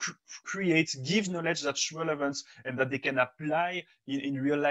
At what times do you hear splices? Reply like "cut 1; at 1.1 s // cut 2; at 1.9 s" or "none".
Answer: none

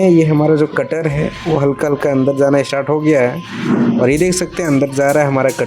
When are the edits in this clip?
none

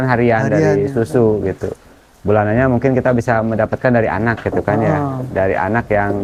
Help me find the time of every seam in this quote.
none

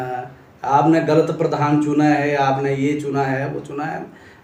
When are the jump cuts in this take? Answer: none

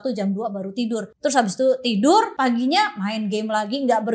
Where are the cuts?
cut 1; at 1.1 s // cut 2; at 2.3 s

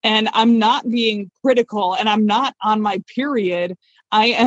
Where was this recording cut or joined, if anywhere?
none

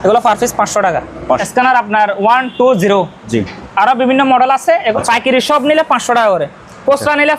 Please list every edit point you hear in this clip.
cut 1; at 1.5 s // cut 2; at 5.0 s

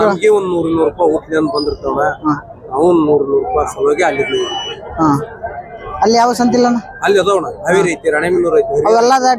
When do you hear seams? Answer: none

